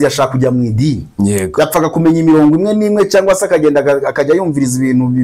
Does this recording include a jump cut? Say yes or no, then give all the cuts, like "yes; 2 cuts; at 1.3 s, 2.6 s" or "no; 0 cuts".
no; 0 cuts